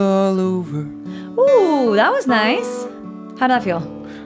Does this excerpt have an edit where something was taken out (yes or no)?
no